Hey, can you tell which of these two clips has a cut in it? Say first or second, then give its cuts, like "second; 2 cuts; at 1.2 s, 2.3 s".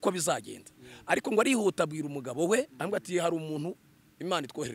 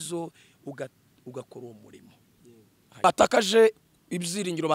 second; 1 cut; at 3.1 s